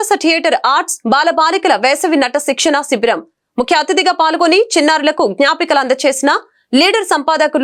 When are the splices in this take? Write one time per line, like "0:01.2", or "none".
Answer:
none